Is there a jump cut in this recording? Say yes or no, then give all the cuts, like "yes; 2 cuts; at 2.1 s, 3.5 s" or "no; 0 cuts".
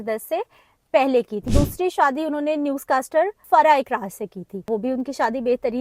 yes; 3 cuts; at 1.4 s, 3.4 s, 4.7 s